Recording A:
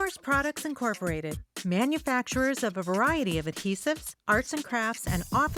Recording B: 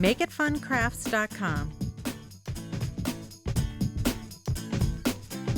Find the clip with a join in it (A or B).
B